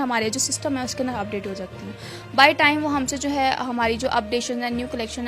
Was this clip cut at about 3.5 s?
no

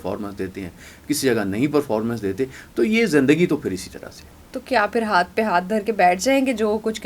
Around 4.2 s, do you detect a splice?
no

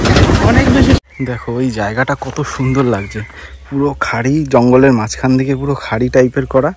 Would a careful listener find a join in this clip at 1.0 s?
yes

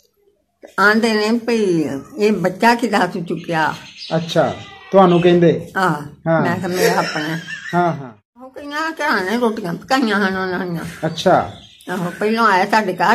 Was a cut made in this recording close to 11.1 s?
no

